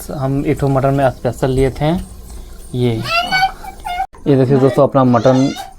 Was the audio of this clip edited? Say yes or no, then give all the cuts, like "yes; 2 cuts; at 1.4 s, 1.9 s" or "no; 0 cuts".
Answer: yes; 1 cut; at 4.1 s